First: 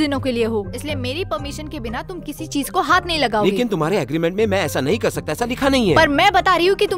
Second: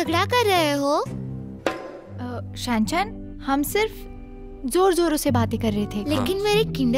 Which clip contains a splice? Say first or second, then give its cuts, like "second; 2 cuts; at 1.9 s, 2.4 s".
second; 2 cuts; at 2.5 s, 6.0 s